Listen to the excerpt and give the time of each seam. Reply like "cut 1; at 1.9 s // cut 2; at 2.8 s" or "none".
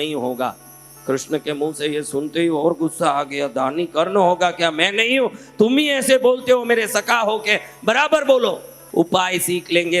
cut 1; at 8.8 s